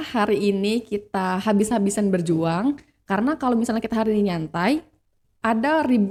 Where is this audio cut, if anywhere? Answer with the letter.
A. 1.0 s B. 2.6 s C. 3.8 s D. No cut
D